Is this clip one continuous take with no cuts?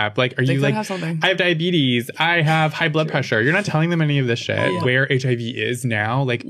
no; 2 cuts; at 1.6 s, 2.6 s

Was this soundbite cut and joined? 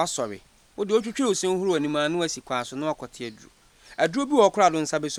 no; 0 cuts

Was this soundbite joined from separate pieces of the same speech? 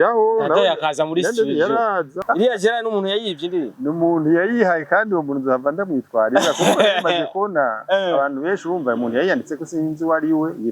yes; 1 cut; at 2.2 s

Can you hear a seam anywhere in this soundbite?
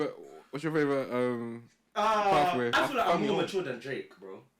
yes; 1 cut; at 2.7 s

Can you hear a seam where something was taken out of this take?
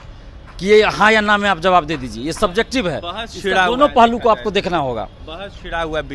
no; 0 cuts

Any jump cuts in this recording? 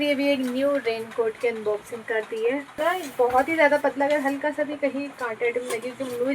yes; 1 cut; at 2.8 s

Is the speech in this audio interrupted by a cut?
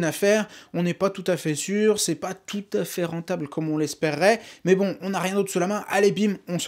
no; 0 cuts

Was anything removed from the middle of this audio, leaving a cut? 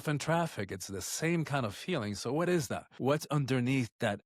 yes; 1 cut; at 2.8 s

